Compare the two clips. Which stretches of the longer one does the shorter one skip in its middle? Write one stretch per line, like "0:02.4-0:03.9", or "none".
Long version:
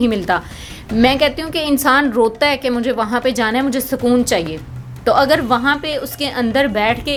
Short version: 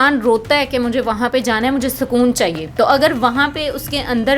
0:04.5-0:04.9